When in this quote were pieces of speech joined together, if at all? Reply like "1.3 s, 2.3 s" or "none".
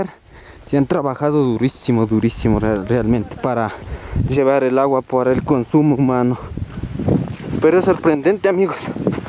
none